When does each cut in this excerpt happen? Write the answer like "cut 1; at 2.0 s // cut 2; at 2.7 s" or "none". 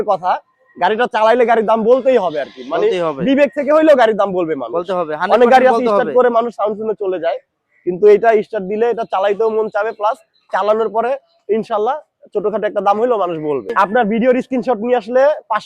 cut 1; at 13.7 s